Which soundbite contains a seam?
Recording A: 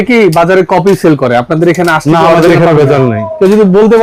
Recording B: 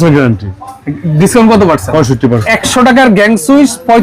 B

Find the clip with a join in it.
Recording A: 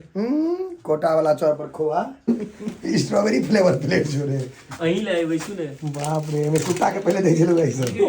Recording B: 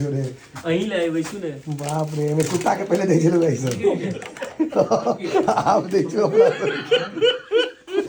A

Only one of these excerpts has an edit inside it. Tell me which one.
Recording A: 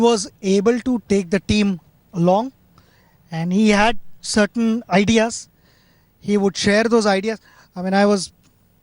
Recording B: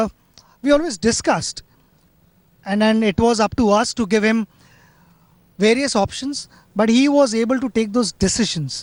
A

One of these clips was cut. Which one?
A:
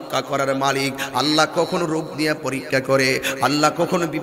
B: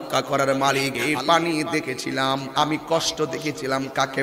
B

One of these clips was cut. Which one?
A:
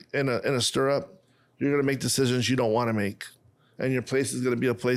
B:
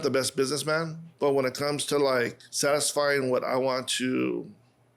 B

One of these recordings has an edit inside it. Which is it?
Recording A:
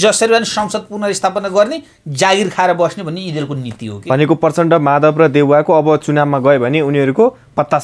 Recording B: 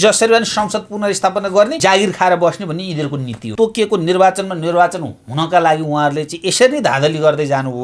B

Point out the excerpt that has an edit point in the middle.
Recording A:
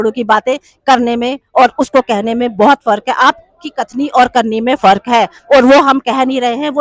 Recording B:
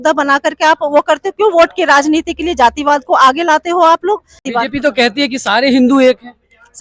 B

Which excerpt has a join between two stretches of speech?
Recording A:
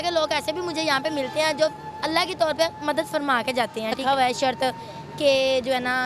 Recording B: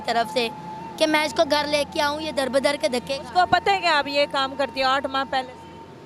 A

